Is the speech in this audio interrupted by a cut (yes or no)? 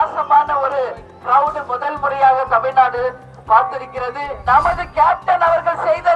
yes